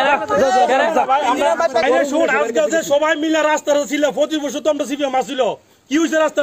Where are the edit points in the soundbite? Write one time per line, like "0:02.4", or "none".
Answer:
0:01.8